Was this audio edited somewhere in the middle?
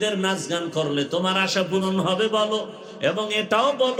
no; 0 cuts

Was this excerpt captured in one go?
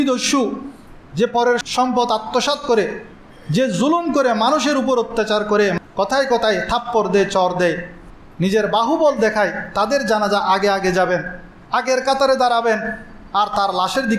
no; 2 cuts; at 1.6 s, 5.8 s

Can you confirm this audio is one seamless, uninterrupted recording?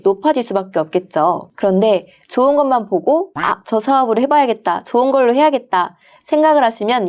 no; 1 cut; at 1.5 s

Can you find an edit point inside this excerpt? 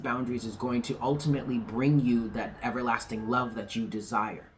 no; 0 cuts

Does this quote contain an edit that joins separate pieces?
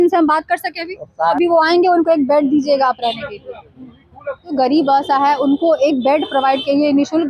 yes; 2 cuts; at 1.3 s, 4.5 s

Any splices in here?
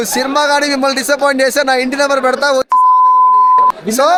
no; 0 cuts

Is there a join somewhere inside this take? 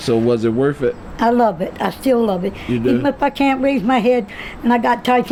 no; 0 cuts

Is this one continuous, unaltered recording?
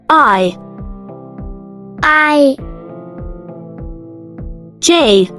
yes; 0 cuts

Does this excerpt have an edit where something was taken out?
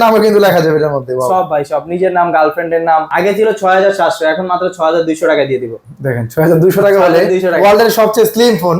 yes; 1 cut; at 3.1 s

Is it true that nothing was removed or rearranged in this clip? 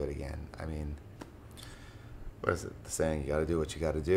no; 1 cut; at 1.1 s

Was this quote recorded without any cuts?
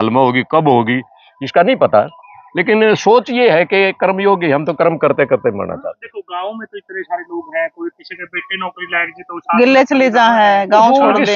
yes; 0 cuts

